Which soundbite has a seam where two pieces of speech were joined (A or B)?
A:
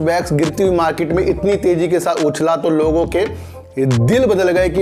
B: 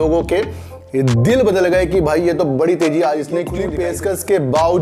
B